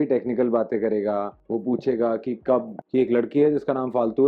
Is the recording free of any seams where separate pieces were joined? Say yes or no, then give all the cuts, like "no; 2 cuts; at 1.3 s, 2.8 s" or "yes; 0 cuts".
no; 1 cut; at 2.8 s